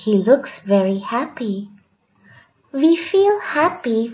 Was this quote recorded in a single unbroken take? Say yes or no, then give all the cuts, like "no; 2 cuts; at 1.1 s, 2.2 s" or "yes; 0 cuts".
no; 1 cut; at 1.3 s